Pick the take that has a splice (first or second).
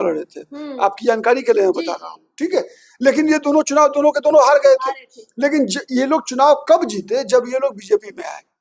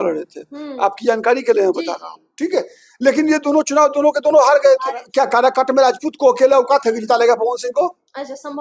second